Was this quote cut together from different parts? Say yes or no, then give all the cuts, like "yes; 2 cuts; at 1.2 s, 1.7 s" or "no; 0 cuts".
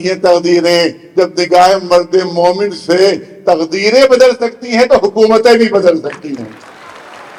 no; 0 cuts